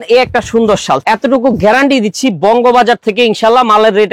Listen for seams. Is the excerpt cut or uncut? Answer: cut